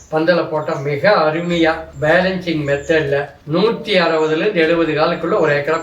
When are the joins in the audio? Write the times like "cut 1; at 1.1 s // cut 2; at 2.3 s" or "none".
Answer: cut 1; at 1.9 s // cut 2; at 3.4 s